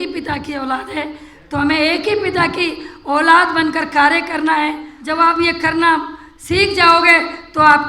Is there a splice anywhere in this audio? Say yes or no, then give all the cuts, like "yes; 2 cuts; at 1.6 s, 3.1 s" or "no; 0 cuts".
yes; 1 cut; at 4.9 s